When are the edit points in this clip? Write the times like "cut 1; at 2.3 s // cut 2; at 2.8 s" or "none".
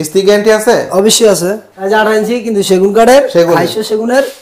cut 1; at 1.7 s